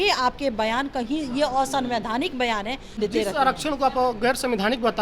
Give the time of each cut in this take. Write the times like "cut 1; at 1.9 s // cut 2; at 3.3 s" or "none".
cut 1; at 3.0 s

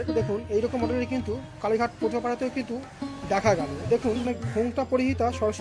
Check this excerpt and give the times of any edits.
cut 1; at 4.2 s

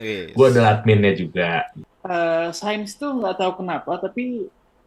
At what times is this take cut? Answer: cut 1; at 1.8 s

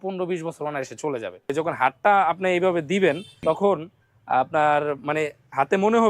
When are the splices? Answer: cut 1; at 1.5 s // cut 2; at 3.3 s

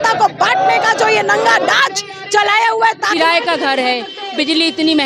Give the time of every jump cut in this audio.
cut 1; at 3.1 s

